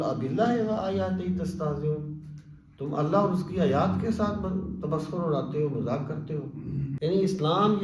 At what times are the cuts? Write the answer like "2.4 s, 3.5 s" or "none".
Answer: 6.9 s